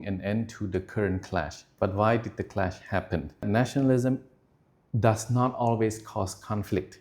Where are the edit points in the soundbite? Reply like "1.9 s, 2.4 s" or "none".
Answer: 3.4 s